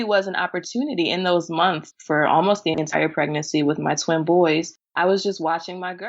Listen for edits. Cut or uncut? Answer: cut